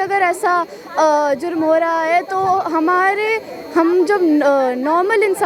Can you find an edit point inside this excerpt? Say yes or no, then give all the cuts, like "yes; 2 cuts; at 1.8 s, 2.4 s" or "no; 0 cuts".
no; 0 cuts